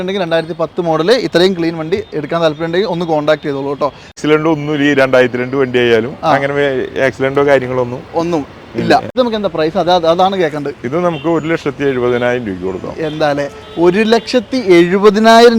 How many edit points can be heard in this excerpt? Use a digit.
2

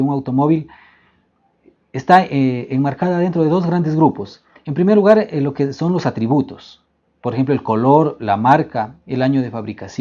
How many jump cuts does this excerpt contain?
0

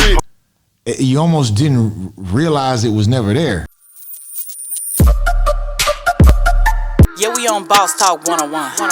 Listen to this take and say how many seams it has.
1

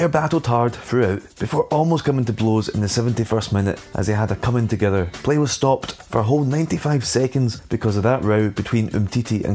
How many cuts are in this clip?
5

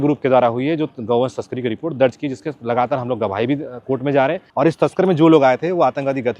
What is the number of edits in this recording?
1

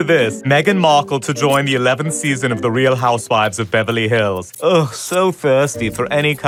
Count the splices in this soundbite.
0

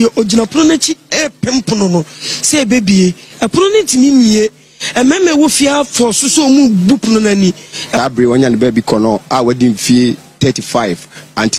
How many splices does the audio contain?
1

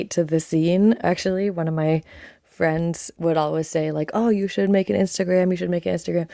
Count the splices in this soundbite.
1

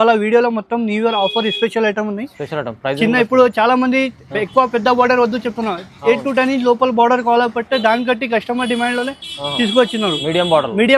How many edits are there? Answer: 0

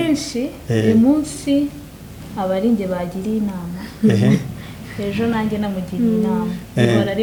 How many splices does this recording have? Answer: 0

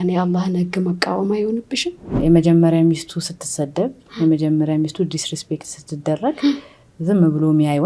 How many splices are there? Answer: 1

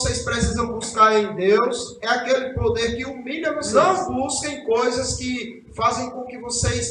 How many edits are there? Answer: 1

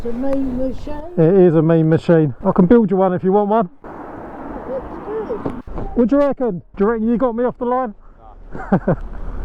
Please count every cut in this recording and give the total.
2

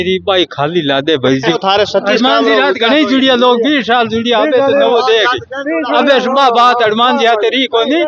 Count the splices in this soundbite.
1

